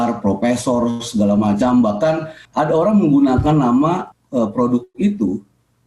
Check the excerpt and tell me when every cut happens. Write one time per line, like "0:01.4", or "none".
0:02.4
0:04.1